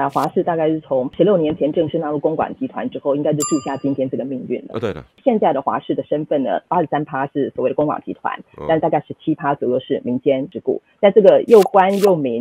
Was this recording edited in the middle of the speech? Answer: yes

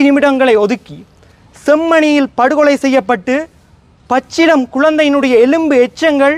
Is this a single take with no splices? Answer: yes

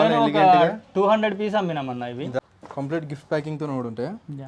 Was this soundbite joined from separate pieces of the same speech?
yes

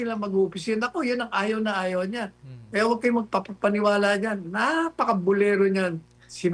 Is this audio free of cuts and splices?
yes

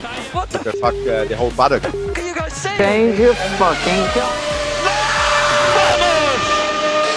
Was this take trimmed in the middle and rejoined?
no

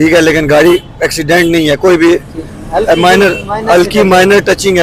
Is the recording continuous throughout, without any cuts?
yes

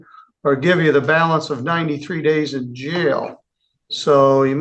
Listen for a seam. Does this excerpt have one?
no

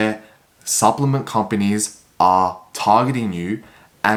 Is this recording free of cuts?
yes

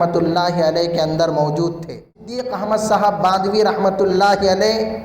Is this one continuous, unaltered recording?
no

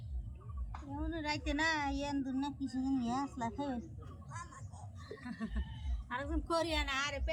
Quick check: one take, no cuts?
yes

